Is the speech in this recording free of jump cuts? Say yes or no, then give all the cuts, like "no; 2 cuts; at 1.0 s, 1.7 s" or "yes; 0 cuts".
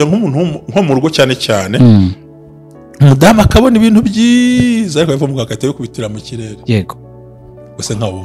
yes; 0 cuts